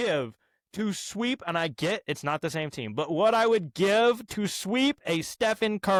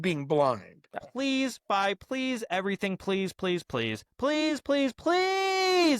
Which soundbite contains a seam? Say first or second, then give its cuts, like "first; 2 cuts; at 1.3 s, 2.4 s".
second; 1 cut; at 0.9 s